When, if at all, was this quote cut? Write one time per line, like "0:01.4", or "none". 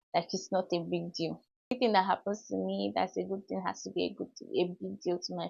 none

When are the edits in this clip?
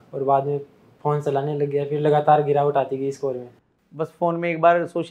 none

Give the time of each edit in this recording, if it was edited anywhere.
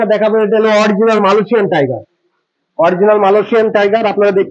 none

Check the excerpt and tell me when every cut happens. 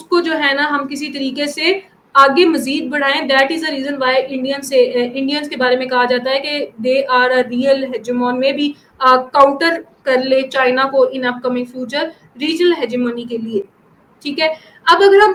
none

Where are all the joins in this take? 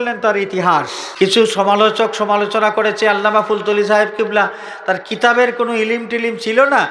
0:01.0

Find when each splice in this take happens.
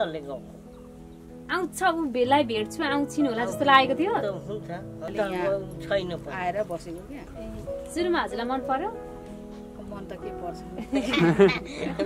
0:05.1

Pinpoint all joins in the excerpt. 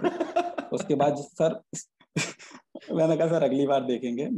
none

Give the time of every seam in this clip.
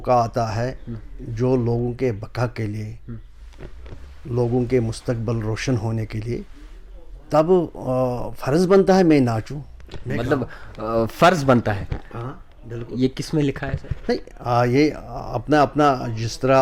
none

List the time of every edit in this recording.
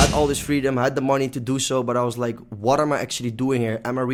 none

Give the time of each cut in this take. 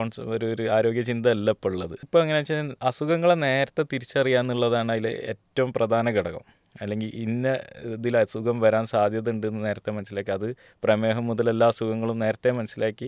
0:02.0

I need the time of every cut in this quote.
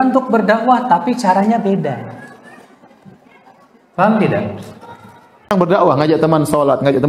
0:05.5

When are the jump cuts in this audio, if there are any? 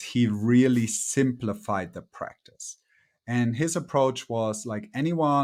none

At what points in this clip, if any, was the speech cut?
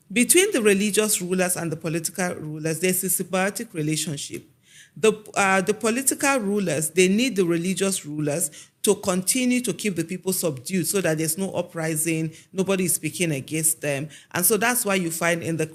none

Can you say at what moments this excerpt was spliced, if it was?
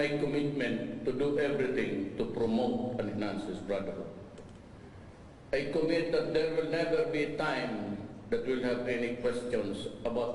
0:03.3

